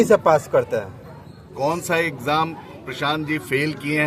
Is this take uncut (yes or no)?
yes